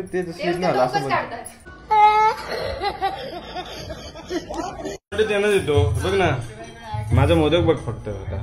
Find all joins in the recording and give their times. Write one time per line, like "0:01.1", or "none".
0:05.1